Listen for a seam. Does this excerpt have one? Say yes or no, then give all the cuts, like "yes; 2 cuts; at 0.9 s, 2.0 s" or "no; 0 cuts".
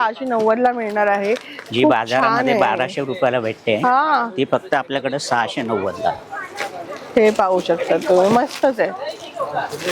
no; 0 cuts